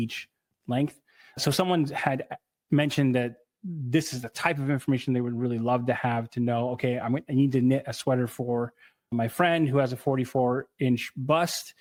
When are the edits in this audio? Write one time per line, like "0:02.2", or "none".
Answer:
none